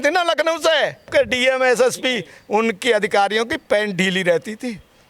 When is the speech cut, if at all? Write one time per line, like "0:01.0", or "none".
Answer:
0:01.1